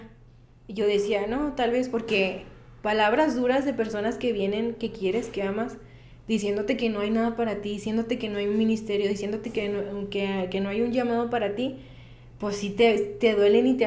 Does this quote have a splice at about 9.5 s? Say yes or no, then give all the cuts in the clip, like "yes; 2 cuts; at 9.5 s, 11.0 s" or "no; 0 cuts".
no; 0 cuts